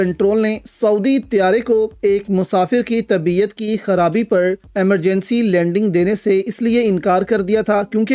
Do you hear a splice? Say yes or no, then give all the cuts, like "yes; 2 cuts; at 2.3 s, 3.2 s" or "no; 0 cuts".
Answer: no; 0 cuts